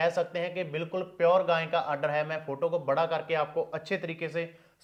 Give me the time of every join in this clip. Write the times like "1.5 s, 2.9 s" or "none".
none